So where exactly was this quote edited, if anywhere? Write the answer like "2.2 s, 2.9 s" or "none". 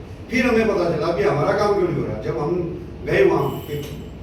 none